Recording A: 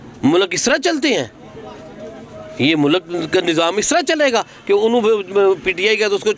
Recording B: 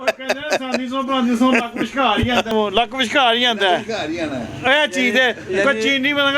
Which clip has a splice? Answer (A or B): B